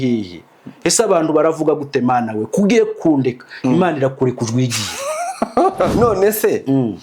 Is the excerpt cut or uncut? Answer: cut